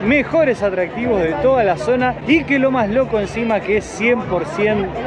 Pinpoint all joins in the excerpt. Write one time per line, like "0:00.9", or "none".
none

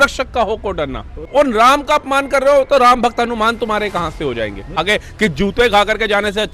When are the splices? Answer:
0:01.2
0:04.7

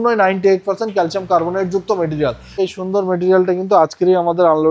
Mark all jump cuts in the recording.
0:02.6

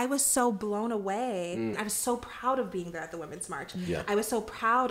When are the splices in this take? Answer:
0:01.8

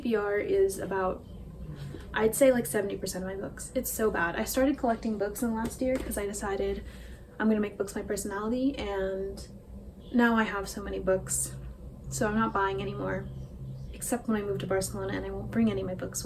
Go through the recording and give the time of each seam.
none

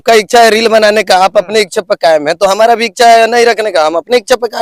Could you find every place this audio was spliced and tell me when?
none

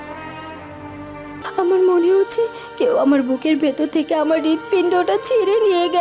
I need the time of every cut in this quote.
0:01.4

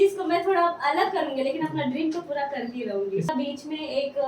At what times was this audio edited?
0:03.3

